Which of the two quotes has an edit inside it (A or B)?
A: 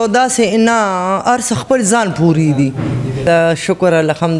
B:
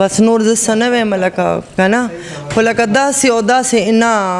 A